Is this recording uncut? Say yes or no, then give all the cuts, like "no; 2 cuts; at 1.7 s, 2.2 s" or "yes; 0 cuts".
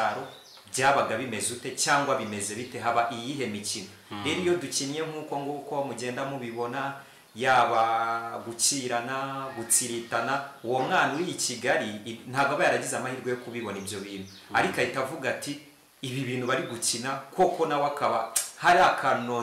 yes; 0 cuts